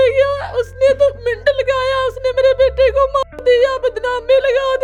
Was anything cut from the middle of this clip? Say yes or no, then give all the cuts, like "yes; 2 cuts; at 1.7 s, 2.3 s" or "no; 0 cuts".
no; 0 cuts